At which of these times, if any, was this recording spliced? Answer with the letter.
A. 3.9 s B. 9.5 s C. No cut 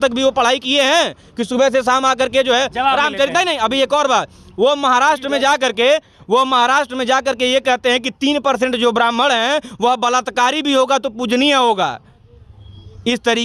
C